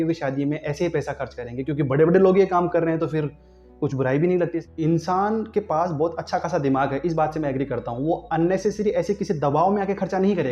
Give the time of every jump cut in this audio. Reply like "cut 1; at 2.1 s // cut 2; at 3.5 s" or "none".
cut 1; at 4.6 s